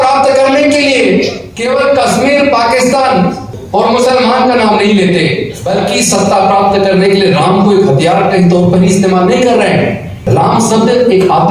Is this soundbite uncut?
no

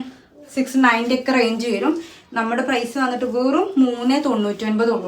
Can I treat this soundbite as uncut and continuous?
yes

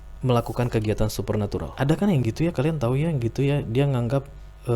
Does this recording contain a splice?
yes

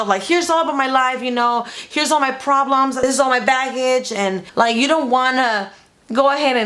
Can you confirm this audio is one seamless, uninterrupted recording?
no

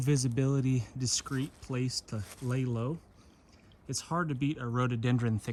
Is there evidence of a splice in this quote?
no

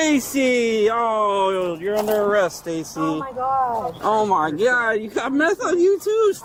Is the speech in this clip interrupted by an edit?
no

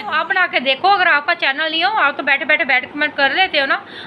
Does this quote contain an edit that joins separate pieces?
no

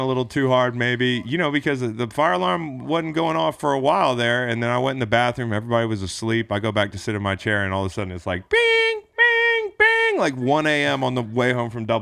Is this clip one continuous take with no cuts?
yes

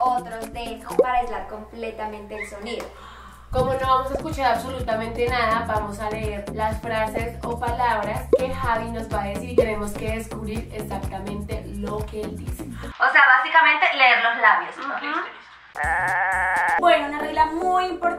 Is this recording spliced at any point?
no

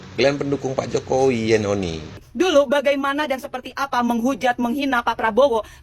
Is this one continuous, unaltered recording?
no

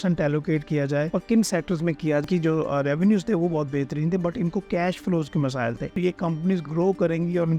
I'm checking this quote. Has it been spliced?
yes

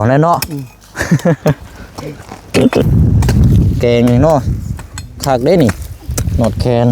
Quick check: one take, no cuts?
no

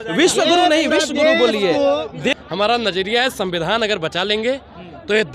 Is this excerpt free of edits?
no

